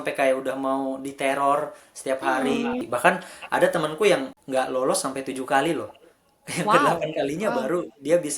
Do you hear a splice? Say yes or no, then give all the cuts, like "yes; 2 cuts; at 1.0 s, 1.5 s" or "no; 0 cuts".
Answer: yes; 2 cuts; at 2.8 s, 4.4 s